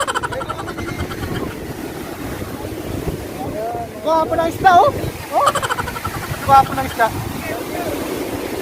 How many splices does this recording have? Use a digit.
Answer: 1